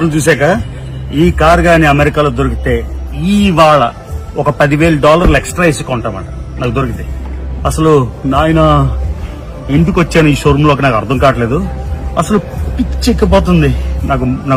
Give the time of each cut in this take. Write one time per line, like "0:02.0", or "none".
none